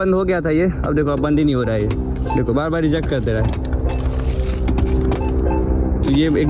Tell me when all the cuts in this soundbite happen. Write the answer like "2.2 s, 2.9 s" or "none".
none